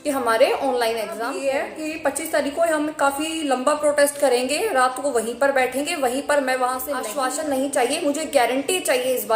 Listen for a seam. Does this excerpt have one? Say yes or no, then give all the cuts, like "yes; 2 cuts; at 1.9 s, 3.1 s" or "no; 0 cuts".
yes; 2 cuts; at 1.3 s, 7.1 s